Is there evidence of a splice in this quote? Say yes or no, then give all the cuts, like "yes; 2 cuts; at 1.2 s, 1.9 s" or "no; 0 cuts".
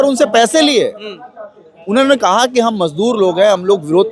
no; 0 cuts